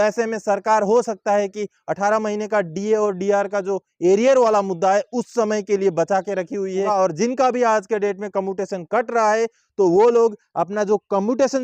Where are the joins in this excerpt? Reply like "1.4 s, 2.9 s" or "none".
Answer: 6.9 s